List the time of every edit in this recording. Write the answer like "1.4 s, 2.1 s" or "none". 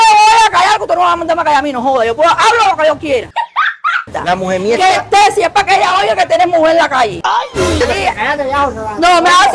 7.7 s